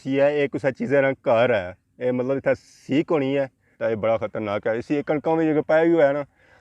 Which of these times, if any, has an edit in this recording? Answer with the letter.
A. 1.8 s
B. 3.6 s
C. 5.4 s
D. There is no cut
B